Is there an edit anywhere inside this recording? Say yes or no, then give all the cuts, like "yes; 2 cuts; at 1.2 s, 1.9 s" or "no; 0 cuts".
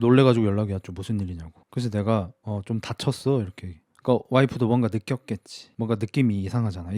no; 0 cuts